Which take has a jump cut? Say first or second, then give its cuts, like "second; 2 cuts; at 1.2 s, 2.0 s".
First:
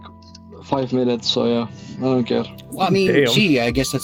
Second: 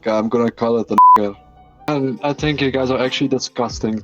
second; 1 cut; at 1.9 s